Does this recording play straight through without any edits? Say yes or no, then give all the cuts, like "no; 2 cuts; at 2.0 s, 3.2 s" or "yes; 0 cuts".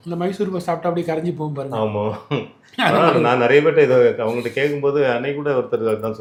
yes; 0 cuts